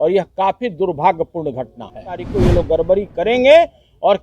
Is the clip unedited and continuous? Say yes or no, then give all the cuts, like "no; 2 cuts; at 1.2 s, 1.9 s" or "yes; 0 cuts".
no; 1 cut; at 2.2 s